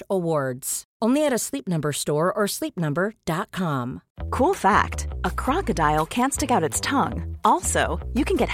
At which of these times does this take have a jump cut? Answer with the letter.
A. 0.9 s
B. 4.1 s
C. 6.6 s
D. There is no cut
B